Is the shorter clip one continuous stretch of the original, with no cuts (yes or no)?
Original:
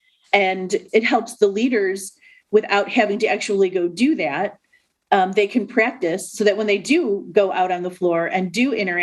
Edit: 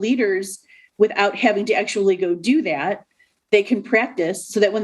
no